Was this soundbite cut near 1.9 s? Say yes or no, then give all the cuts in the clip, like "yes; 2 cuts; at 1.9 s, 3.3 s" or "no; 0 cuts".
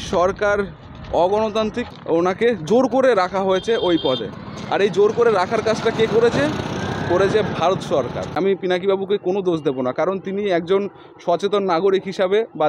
yes; 2 cuts; at 1.9 s, 8.4 s